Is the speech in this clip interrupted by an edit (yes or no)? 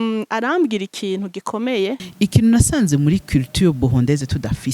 yes